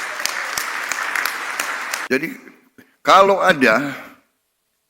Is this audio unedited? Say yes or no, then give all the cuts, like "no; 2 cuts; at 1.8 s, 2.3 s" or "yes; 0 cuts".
no; 1 cut; at 1.9 s